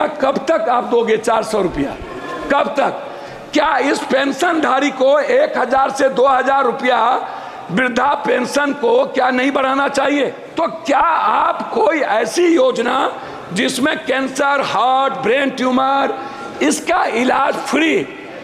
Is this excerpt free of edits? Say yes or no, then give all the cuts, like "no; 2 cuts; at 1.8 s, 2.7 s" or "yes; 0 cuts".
no; 1 cut; at 10.4 s